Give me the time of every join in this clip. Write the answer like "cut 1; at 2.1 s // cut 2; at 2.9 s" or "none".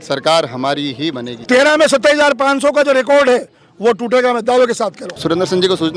cut 1; at 1.3 s // cut 2; at 5.1 s